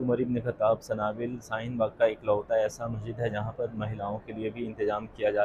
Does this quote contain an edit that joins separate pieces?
no; 0 cuts

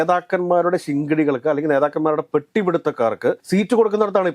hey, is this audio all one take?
no; 1 cut; at 3.4 s

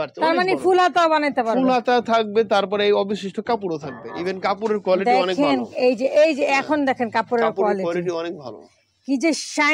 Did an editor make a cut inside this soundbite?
no; 0 cuts

